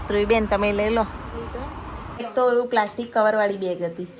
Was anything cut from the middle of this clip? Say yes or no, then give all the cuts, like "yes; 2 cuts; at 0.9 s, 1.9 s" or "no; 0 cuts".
yes; 1 cut; at 2.3 s